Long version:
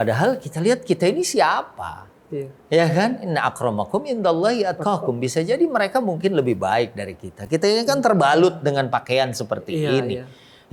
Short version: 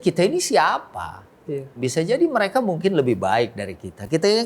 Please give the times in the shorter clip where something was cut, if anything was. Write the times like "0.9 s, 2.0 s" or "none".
1.8 s